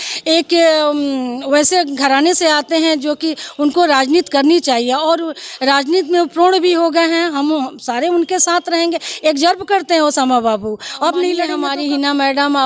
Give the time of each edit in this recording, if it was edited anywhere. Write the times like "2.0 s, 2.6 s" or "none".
11.6 s